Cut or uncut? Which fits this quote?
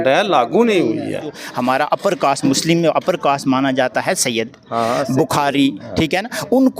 cut